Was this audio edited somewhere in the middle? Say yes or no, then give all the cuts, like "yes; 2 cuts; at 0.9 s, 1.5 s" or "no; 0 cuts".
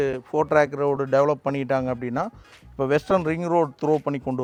no; 0 cuts